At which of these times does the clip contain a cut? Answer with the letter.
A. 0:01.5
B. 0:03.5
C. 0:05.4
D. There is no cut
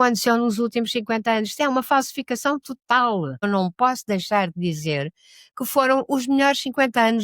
B